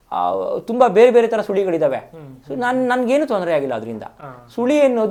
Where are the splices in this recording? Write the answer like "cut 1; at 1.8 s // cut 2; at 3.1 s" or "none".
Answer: none